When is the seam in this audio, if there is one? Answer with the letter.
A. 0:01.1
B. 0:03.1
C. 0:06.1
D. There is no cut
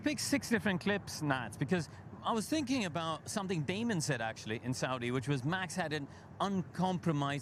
D